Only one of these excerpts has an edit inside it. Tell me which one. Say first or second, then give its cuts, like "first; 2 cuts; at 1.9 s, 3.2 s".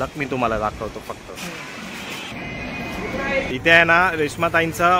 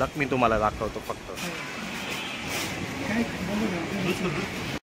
first; 2 cuts; at 2.3 s, 3.5 s